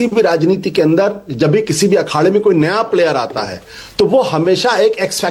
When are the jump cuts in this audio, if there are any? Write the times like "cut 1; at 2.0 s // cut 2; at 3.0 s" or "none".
none